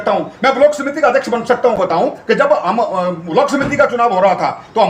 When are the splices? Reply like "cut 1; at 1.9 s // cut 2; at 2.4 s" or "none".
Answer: cut 1; at 1.8 s